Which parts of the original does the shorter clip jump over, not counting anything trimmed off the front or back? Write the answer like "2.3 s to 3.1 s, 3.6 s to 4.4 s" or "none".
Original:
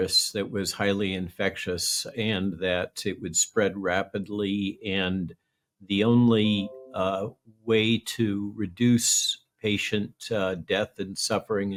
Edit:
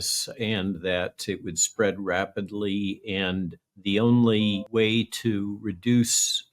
5.4 s to 5.7 s, 6.7 s to 7.6 s